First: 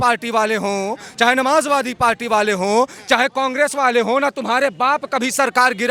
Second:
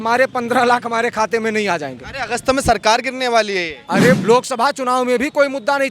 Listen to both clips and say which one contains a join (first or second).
second